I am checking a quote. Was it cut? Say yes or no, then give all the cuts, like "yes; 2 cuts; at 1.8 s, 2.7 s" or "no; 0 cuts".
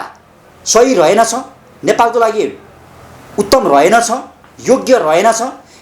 no; 0 cuts